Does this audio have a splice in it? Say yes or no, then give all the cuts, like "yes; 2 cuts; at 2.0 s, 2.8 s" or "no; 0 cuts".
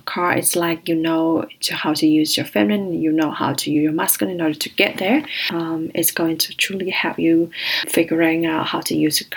yes; 2 cuts; at 5.4 s, 7.8 s